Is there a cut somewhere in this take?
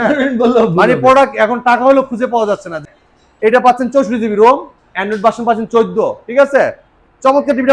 yes; 1 cut; at 2.8 s

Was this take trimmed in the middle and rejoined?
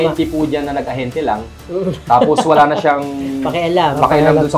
no; 0 cuts

